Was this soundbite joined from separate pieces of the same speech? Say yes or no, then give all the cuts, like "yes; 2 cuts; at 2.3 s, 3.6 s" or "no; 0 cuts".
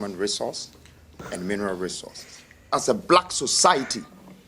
yes; 1 cut; at 2.7 s